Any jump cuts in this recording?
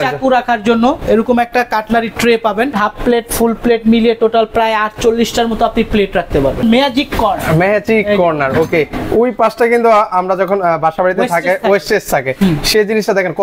yes; 2 cuts; at 2.7 s, 6.6 s

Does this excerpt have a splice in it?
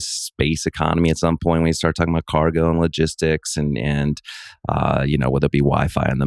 no; 0 cuts

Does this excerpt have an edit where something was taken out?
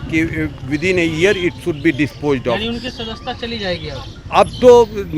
no; 0 cuts

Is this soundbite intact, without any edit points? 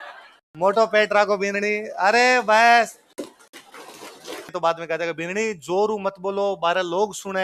no; 1 cut; at 4.5 s

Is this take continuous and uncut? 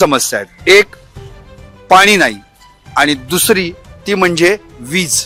yes; 0 cuts

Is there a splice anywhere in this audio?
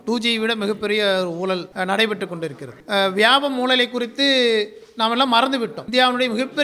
yes; 3 cuts; at 1.7 s, 2.7 s, 5.8 s

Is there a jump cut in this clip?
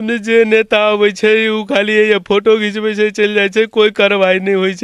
no; 0 cuts

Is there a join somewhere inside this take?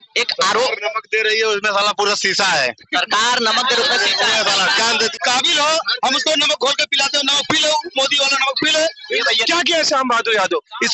yes; 2 cuts; at 5.1 s, 9.4 s

